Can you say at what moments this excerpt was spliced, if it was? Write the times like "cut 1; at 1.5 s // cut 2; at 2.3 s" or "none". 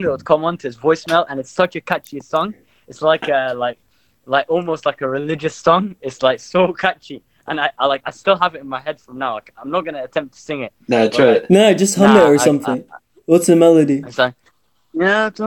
none